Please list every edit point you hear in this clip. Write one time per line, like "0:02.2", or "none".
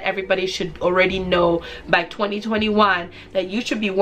none

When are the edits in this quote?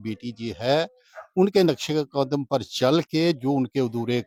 none

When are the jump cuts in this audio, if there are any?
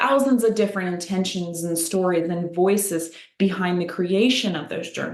none

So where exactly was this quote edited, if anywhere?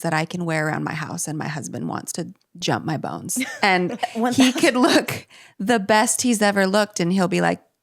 none

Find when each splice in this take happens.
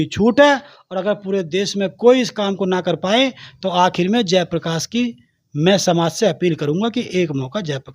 none

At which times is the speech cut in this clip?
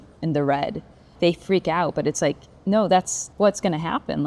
0:01.1
0:03.2

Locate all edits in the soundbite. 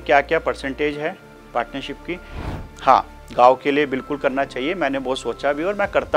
0:02.4

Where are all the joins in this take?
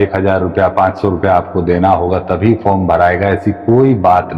none

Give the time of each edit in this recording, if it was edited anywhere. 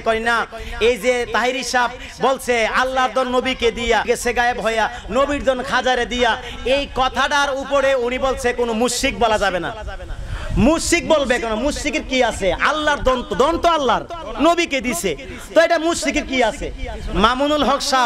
0:04.0

